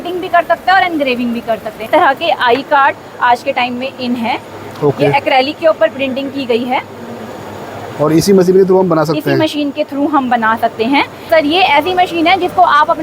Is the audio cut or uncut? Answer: cut